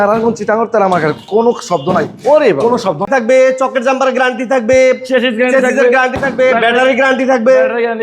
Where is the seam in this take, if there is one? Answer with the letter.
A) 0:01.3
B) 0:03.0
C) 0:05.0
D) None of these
B